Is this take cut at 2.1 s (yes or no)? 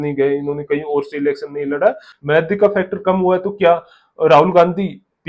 yes